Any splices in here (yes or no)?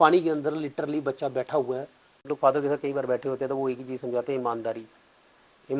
yes